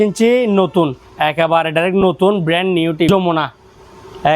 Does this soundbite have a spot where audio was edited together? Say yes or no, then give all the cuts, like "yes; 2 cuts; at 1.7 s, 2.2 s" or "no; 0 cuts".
yes; 1 cut; at 3.1 s